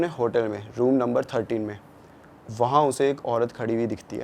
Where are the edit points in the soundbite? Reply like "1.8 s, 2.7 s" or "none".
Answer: none